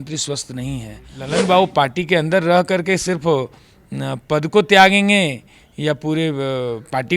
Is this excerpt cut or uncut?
cut